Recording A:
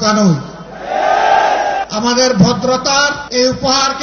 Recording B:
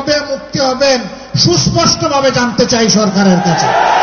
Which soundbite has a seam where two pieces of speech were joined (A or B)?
A